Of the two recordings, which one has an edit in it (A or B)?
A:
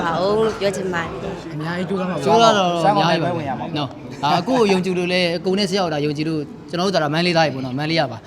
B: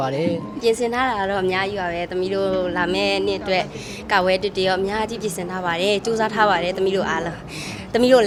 A